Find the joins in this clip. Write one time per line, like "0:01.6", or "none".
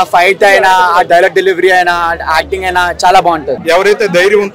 0:03.6